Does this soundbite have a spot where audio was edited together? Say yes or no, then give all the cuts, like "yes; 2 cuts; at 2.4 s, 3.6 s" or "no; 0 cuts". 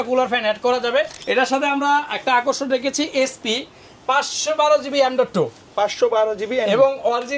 yes; 1 cut; at 1.2 s